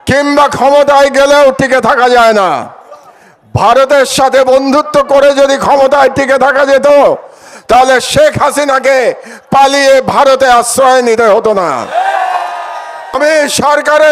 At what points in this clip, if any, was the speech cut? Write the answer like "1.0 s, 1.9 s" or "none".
13.2 s